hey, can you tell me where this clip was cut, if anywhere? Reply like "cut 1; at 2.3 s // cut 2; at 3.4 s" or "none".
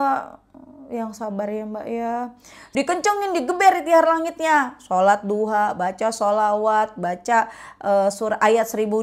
cut 1; at 2.5 s